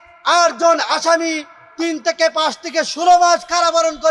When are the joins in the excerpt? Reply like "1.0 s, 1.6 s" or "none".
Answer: none